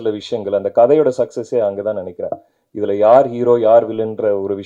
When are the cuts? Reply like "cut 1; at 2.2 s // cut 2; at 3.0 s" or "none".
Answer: none